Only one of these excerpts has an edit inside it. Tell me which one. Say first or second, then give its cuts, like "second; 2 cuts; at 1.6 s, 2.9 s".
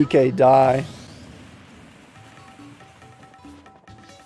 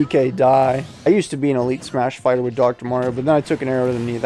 second; 1 cut; at 1.1 s